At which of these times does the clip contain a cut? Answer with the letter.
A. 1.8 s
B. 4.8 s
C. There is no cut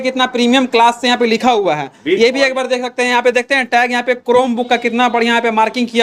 C